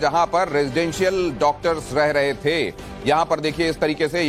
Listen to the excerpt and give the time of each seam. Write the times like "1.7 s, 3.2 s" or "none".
none